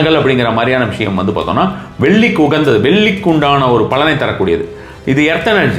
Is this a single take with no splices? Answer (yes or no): yes